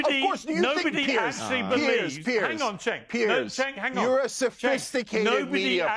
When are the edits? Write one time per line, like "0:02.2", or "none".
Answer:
none